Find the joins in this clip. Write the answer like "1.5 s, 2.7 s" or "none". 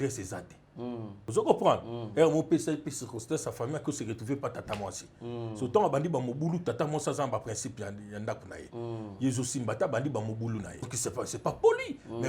1.2 s, 10.9 s

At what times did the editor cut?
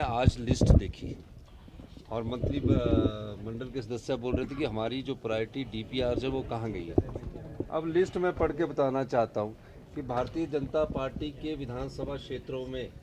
3.1 s

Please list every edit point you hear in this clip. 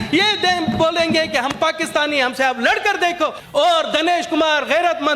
3.4 s

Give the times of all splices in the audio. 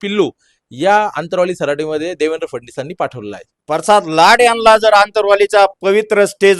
3.5 s

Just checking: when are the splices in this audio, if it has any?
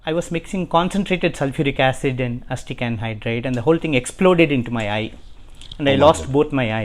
none

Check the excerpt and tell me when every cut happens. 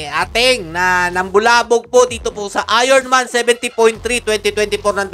none

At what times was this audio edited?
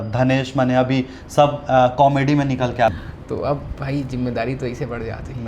3.0 s

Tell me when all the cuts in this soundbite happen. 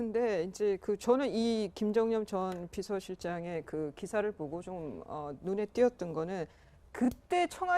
3.8 s

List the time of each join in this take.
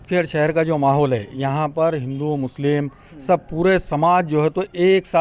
none

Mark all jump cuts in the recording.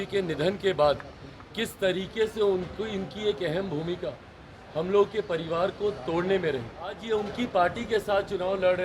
7.0 s

